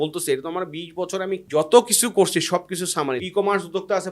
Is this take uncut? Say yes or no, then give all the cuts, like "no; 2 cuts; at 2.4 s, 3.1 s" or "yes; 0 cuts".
no; 2 cuts; at 1.4 s, 3.2 s